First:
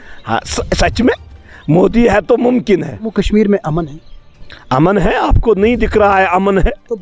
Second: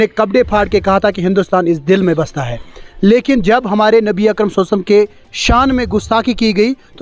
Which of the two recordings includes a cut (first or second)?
first